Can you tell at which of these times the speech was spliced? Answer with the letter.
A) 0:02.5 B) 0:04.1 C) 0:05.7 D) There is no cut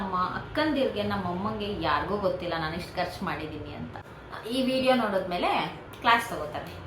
B